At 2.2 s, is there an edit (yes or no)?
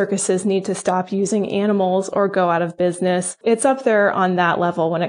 no